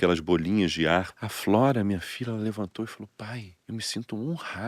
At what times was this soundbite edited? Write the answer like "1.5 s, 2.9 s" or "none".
1.2 s, 3.5 s